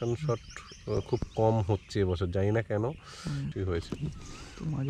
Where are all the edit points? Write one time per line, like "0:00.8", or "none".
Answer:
0:03.5